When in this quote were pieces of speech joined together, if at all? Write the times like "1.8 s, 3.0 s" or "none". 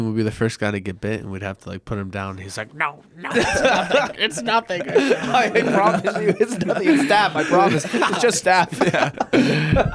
none